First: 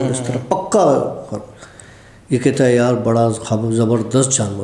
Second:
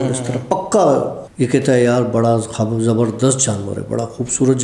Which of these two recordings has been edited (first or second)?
second